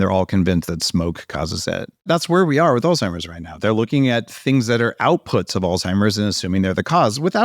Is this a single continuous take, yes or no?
no